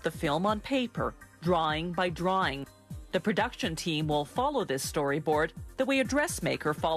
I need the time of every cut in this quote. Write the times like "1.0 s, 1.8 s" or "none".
4.3 s